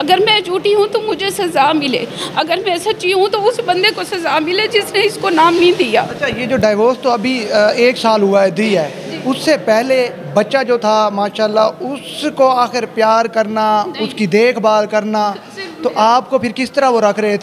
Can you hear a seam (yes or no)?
no